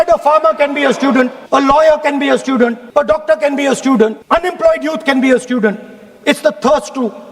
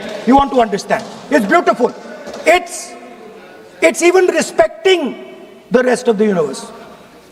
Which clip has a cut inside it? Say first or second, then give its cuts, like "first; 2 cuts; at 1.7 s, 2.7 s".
first; 3 cuts; at 1.4 s, 2.8 s, 4.2 s